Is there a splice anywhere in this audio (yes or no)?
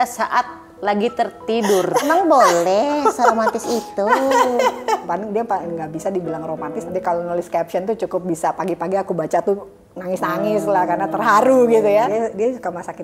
yes